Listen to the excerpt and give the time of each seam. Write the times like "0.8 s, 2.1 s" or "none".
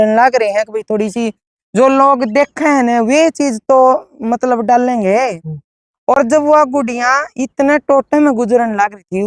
none

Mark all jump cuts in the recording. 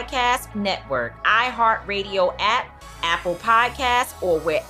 none

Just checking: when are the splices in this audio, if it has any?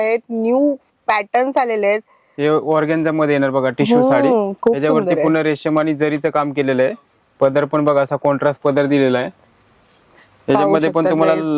none

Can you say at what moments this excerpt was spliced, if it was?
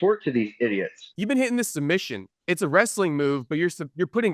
1.1 s, 2.3 s

